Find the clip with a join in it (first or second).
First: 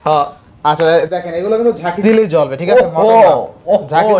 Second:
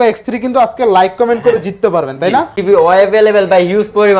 second